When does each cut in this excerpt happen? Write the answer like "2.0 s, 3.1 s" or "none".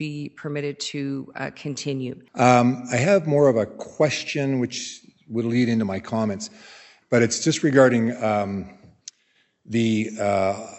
2.2 s, 6.9 s